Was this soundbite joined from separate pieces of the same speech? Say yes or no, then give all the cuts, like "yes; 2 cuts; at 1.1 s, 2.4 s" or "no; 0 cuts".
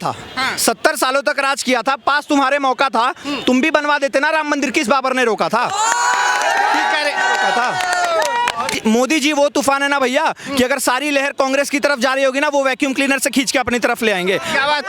yes; 1 cut; at 8.8 s